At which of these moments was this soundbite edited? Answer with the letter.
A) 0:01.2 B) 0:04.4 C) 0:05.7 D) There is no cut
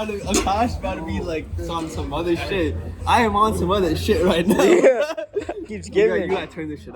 C